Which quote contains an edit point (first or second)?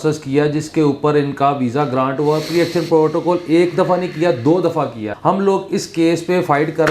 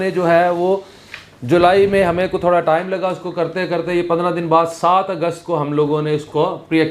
first